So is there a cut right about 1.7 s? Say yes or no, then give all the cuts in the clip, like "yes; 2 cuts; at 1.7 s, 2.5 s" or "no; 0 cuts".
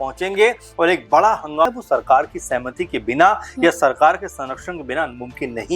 yes; 1 cut; at 1.7 s